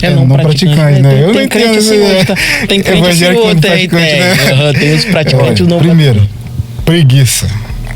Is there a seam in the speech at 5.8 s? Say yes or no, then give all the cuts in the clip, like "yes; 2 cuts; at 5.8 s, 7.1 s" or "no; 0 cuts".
yes; 1 cut; at 5.8 s